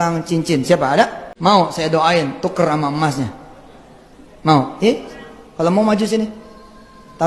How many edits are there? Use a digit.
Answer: 1